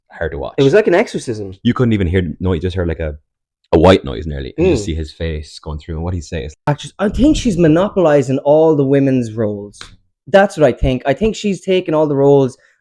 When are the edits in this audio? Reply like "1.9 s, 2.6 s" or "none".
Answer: 6.7 s